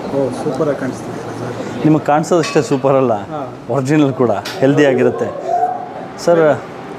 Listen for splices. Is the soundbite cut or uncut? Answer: uncut